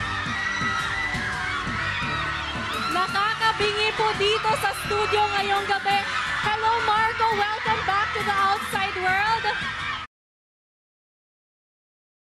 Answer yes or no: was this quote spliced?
no